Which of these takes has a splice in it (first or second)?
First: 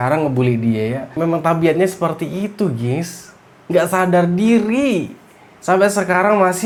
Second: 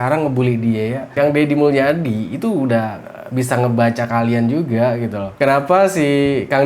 second